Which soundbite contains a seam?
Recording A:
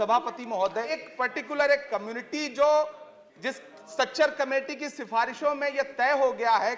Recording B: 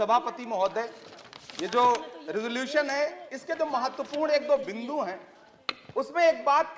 A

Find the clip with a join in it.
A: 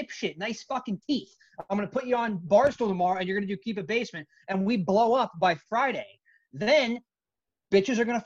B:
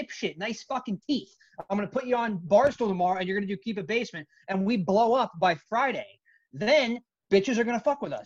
B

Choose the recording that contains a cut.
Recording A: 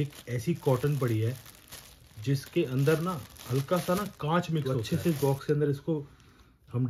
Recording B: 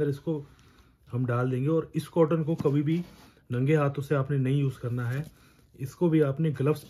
A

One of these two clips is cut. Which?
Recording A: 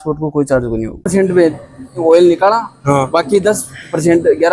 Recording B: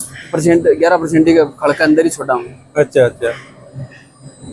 A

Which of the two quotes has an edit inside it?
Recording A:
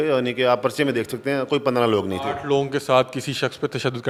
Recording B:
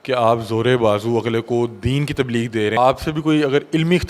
B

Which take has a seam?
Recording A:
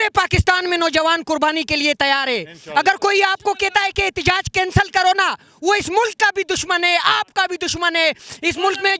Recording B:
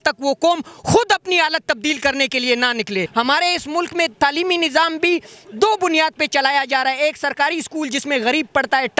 B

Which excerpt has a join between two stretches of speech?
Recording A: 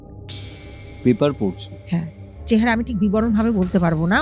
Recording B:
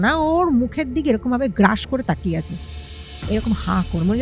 A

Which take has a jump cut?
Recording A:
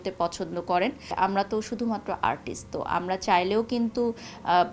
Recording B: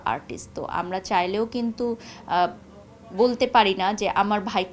A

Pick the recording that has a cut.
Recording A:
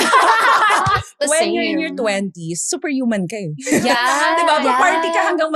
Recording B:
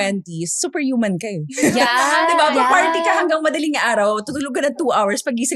A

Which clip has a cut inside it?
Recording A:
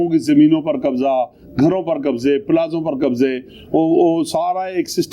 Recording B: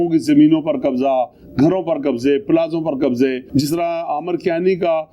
B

